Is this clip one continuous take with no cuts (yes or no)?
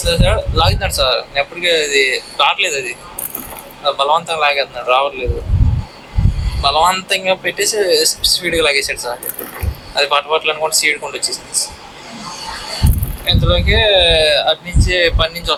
yes